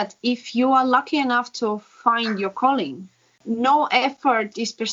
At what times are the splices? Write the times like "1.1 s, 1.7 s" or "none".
3.4 s

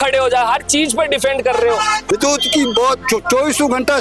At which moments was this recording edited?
2.0 s

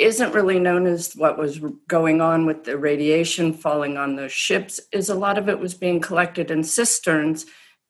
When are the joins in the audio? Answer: none

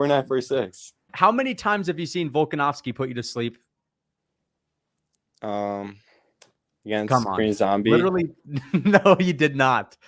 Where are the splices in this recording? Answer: 1.1 s

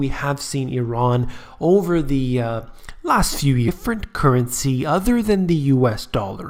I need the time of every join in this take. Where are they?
none

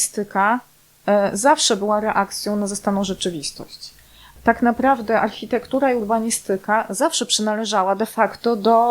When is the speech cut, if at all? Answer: 4.3 s

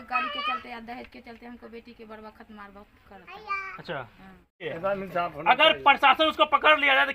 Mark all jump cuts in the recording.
4.6 s

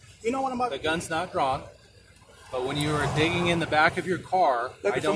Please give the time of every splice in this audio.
none

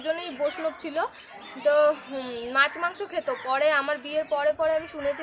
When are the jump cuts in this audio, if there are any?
none

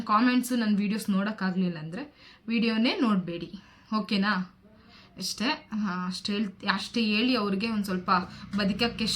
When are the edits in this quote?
none

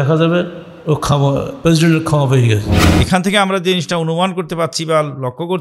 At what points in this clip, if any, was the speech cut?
2.8 s

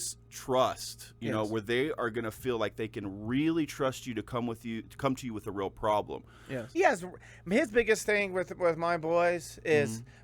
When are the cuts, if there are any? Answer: 6.8 s

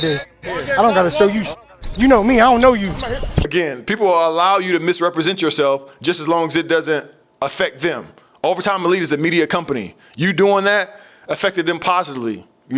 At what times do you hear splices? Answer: 3.5 s

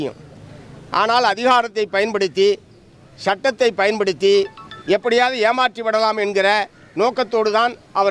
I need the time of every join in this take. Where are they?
none

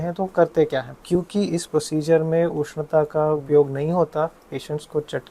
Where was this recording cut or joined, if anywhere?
1.0 s, 3.4 s

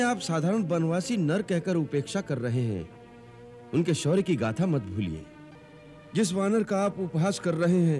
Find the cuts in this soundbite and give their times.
5.4 s

